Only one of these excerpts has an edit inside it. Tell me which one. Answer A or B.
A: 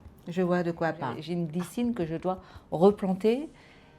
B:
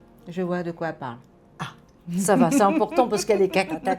A